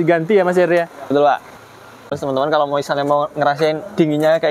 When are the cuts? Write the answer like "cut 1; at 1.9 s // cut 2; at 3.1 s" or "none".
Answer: cut 1; at 2.1 s